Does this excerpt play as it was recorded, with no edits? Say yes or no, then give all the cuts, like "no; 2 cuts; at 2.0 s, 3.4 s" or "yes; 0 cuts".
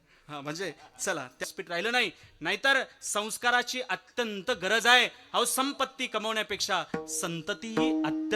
no; 1 cut; at 1.5 s